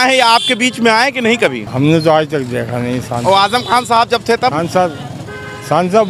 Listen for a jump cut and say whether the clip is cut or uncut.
cut